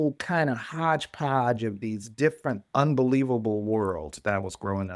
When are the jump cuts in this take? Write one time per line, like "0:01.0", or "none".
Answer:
none